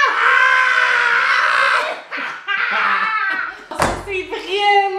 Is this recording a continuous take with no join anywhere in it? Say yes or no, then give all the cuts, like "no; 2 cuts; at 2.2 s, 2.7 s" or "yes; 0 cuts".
no; 1 cut; at 3.7 s